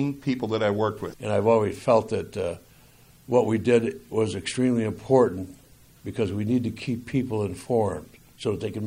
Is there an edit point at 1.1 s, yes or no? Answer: yes